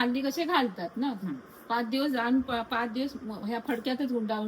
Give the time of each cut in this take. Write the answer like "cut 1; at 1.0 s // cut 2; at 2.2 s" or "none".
none